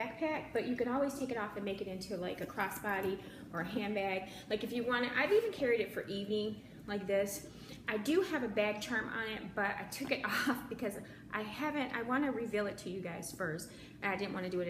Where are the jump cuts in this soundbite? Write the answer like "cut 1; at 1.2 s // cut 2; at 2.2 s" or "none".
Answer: cut 1; at 9.7 s